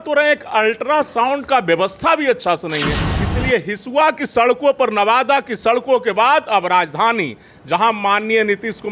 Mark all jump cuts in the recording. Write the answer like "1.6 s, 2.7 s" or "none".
3.1 s